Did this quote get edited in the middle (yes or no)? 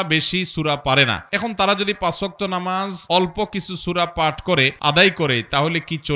yes